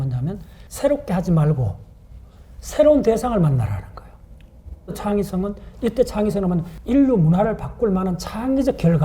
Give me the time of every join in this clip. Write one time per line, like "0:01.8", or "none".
0:05.0
0:06.7